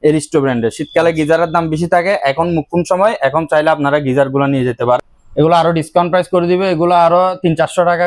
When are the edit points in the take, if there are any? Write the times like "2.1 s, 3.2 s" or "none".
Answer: 5.0 s